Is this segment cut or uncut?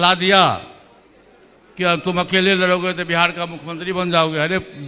uncut